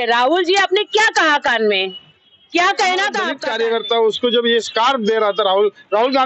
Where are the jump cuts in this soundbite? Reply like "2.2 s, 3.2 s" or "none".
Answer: 3.4 s